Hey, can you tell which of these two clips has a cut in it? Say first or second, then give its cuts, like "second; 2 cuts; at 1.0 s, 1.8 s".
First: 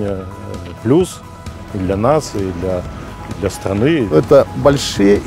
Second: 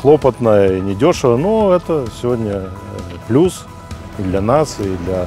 first; 1 cut; at 4.1 s